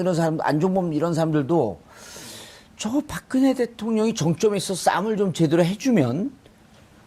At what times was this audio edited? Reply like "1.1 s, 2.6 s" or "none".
none

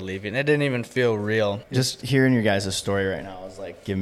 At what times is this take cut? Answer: 1.6 s

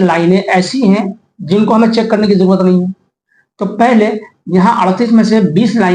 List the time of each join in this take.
none

